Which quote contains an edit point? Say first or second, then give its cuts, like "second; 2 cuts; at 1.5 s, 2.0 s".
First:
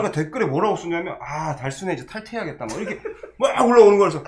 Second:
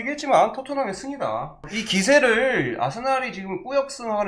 second; 1 cut; at 1.7 s